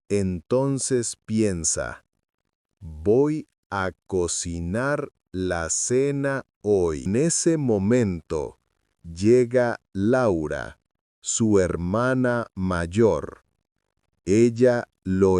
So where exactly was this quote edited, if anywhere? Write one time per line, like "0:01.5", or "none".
0:07.0